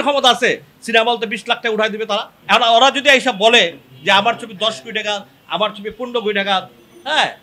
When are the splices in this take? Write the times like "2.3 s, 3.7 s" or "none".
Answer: 2.3 s